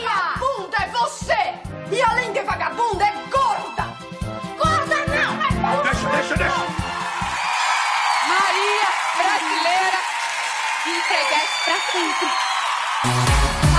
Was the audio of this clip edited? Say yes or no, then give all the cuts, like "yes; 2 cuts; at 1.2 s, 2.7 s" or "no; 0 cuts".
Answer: yes; 1 cut; at 9.2 s